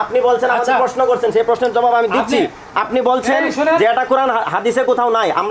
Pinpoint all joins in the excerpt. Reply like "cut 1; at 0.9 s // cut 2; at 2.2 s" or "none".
none